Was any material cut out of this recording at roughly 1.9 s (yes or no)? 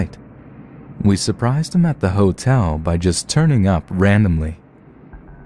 yes